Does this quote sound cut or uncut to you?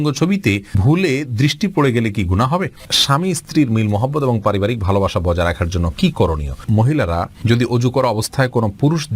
cut